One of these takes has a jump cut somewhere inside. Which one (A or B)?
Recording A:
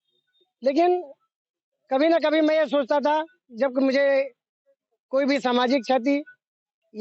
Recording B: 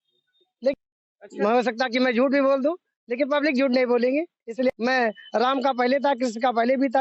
B